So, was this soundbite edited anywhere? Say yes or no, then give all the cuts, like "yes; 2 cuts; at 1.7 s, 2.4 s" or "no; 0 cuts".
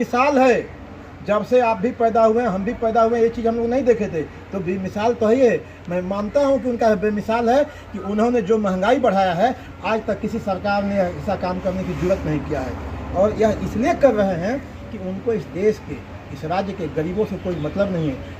no; 0 cuts